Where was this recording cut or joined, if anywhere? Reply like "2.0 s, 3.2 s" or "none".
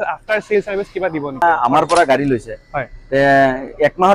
1.4 s